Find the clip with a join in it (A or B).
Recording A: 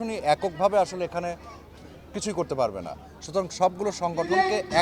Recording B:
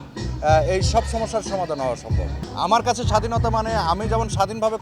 B